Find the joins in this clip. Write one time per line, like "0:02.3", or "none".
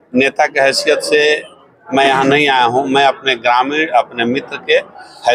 none